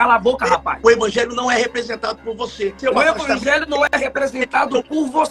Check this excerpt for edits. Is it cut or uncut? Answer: cut